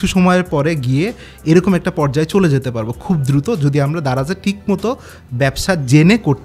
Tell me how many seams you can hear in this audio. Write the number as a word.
zero